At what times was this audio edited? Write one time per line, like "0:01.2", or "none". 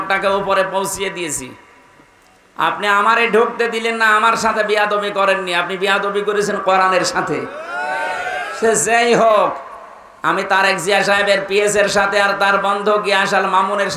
none